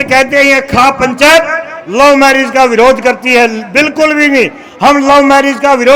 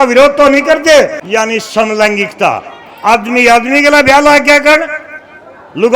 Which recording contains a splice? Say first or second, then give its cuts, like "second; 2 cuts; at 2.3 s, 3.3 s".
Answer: second; 1 cut; at 1.2 s